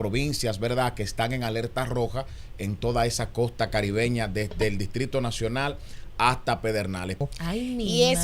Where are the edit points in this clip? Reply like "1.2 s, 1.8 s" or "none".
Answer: 7.2 s